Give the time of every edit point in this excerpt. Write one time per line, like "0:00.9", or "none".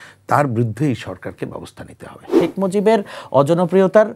0:02.3